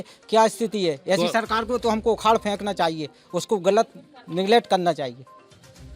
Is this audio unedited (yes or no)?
yes